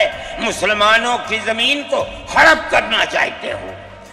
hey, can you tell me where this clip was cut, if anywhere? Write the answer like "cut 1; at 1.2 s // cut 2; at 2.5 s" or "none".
none